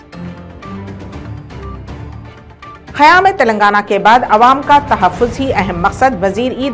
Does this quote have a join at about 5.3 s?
no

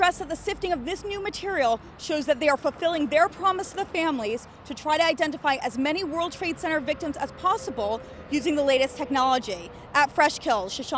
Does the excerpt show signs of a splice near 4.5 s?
no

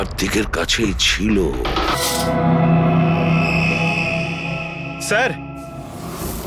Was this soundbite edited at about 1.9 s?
yes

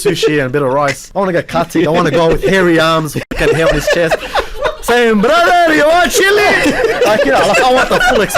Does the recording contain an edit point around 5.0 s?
no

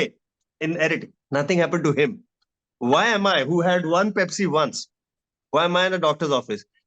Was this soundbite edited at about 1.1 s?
yes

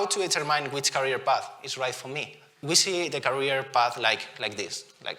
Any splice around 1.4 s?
no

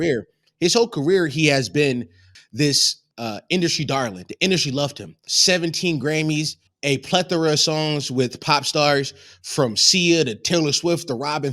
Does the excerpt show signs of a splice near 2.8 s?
yes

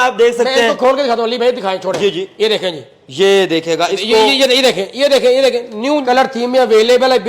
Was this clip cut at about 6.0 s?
yes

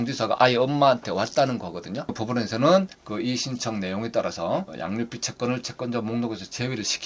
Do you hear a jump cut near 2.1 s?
yes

